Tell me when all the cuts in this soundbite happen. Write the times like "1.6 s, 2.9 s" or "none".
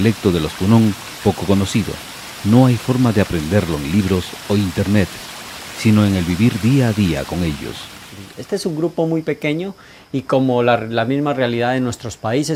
none